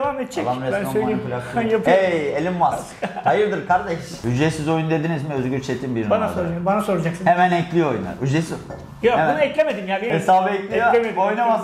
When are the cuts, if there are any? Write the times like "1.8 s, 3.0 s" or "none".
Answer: 4.1 s, 10.1 s